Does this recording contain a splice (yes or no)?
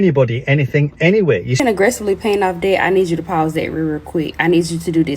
yes